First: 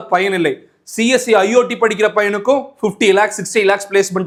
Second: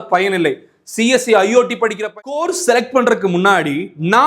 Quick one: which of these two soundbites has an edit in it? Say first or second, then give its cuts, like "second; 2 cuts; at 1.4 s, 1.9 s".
second; 1 cut; at 2.4 s